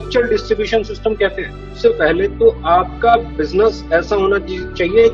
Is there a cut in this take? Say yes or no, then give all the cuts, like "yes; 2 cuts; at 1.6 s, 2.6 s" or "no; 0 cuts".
yes; 1 cut; at 1.7 s